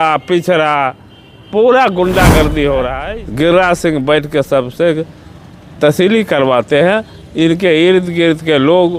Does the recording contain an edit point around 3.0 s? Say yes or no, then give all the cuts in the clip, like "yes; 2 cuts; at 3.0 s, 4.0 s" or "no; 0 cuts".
yes; 1 cut; at 3.0 s